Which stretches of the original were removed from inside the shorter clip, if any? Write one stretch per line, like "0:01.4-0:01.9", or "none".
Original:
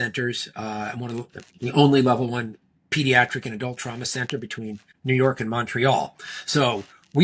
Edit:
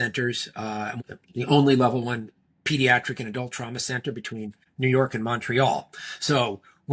0:01.0-0:01.3